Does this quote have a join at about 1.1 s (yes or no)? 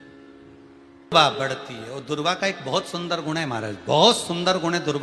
yes